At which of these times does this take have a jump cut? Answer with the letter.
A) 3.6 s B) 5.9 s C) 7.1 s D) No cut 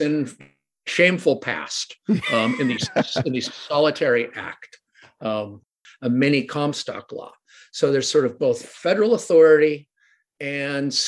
B